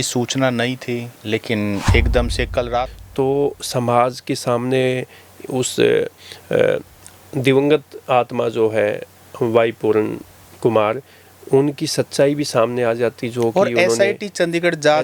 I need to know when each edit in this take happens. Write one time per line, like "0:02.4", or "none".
0:03.0